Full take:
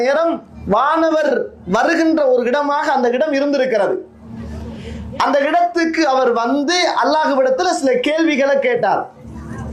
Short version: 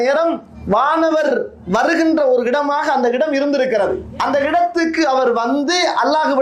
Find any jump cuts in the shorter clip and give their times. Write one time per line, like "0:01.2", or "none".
0:04.1